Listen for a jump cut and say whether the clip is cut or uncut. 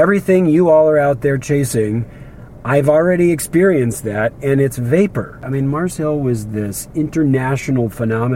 cut